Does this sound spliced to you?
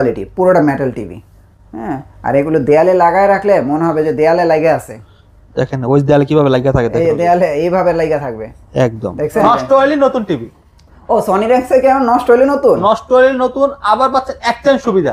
yes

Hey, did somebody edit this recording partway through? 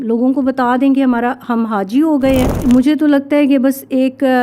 yes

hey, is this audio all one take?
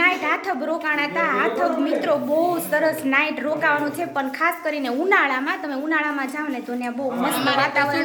yes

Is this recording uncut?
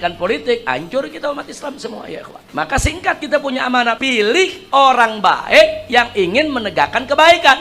no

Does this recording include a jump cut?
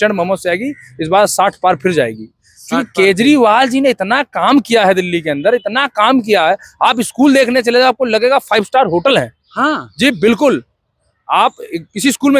no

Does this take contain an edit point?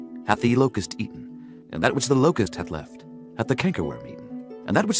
yes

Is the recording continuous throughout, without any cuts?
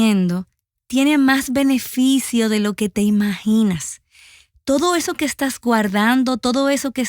yes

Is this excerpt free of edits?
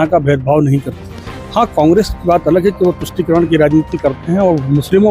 yes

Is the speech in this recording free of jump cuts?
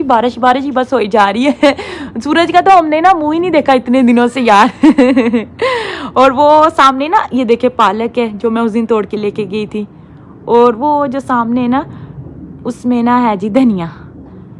yes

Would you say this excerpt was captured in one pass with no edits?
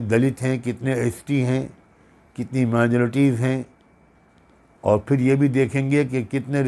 yes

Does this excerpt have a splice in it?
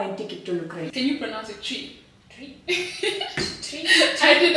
yes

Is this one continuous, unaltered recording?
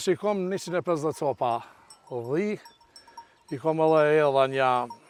yes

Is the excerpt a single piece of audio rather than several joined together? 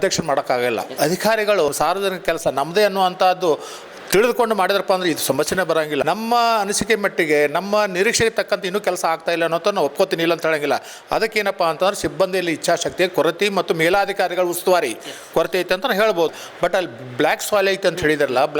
no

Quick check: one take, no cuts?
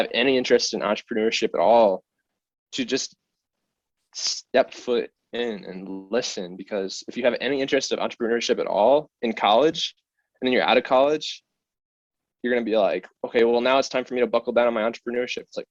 yes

